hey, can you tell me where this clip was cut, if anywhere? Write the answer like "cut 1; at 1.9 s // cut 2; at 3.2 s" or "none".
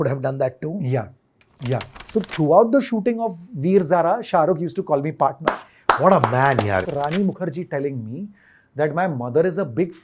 cut 1; at 2.0 s // cut 2; at 6.8 s